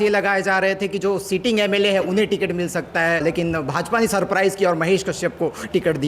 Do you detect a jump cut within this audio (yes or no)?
yes